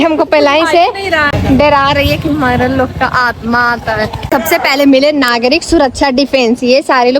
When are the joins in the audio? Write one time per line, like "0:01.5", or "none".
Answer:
0:01.3
0:04.3